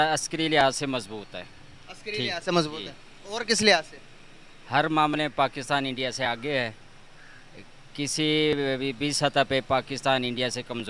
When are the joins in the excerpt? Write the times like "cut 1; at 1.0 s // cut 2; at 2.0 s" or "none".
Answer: none